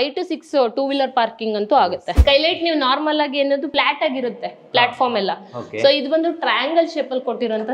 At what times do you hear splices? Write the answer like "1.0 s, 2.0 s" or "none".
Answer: 2.2 s, 3.7 s